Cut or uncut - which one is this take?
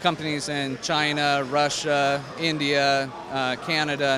uncut